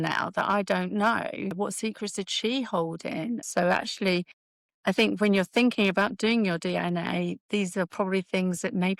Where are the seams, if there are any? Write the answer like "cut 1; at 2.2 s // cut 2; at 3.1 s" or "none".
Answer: none